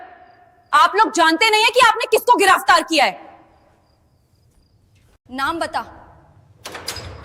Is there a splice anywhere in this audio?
no; 0 cuts

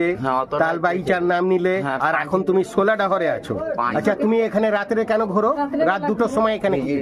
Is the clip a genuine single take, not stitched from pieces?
yes; 0 cuts

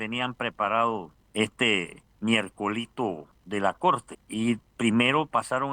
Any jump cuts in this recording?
yes; 4 cuts; at 1.2 s, 2.0 s, 3.3 s, 4.2 s

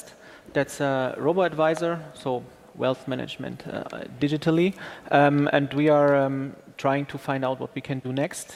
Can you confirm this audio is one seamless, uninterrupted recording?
no; 1 cut; at 4.7 s

